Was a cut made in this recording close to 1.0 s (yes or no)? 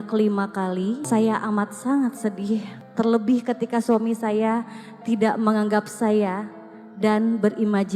yes